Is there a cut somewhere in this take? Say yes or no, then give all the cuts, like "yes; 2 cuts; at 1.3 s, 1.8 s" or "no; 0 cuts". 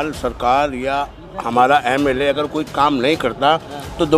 no; 0 cuts